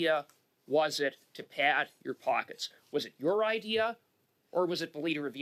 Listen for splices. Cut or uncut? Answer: uncut